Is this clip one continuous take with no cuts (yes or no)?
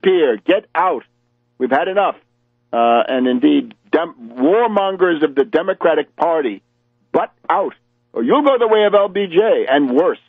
no